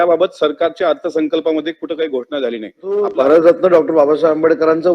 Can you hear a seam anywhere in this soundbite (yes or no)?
yes